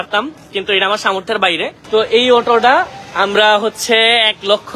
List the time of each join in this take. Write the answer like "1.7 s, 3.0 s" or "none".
1.7 s